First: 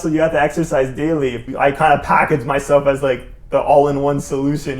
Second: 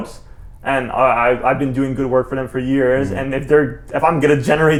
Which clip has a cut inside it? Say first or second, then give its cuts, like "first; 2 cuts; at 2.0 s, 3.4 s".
first; 1 cut; at 1.4 s